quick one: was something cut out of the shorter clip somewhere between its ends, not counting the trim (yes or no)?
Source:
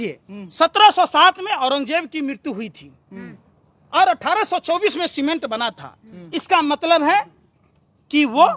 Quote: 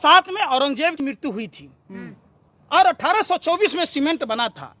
yes